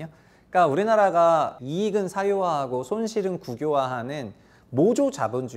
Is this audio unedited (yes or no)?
no